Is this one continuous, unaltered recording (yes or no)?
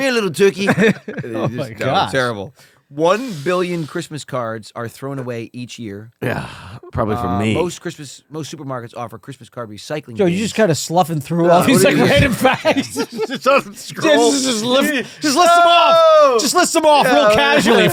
yes